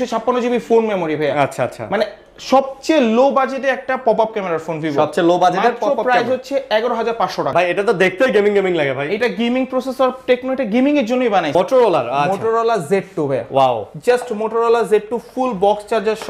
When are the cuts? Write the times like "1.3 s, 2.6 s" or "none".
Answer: 7.5 s, 11.5 s